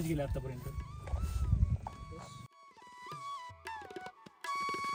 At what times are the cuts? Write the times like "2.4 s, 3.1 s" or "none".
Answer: none